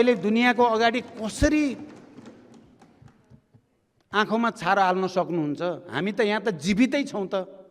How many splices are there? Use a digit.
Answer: 0